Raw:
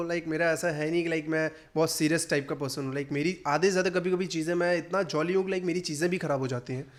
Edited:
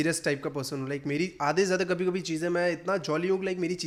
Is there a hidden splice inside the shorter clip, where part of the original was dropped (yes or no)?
no